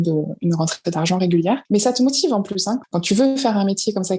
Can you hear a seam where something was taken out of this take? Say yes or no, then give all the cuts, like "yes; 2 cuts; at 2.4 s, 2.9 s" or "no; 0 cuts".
yes; 2 cuts; at 1.6 s, 2.9 s